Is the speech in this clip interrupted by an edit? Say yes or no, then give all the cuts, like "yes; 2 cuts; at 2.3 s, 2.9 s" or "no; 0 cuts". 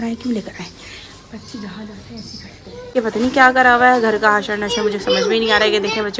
yes; 1 cut; at 2.9 s